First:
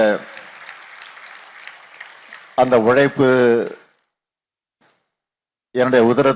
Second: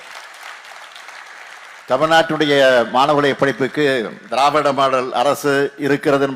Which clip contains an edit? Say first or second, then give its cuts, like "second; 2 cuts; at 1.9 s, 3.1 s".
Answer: second; 1 cut; at 1.8 s